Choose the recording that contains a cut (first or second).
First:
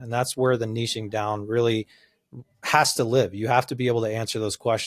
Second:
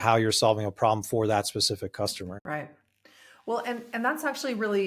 second